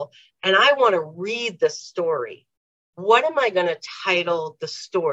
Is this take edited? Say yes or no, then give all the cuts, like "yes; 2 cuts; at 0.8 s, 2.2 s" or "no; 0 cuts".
no; 0 cuts